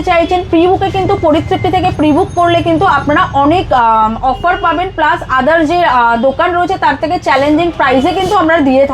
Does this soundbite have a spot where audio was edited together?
no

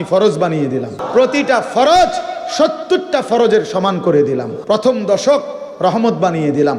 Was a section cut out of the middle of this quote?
yes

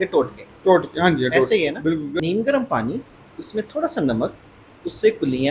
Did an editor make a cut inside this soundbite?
yes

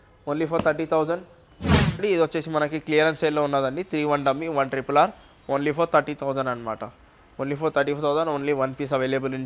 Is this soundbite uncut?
yes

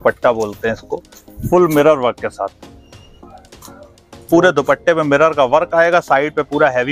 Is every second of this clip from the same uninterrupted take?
yes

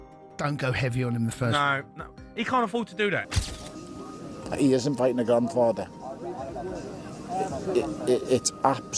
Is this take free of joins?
no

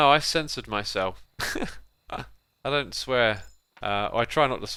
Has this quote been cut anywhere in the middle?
no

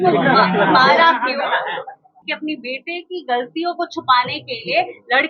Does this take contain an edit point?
yes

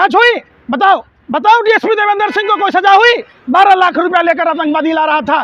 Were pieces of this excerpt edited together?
yes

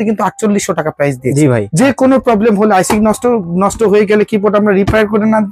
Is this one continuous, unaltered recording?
no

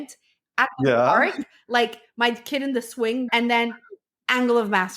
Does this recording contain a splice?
yes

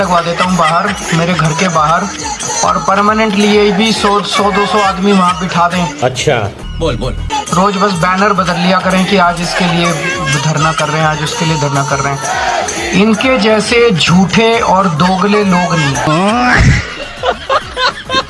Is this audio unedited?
yes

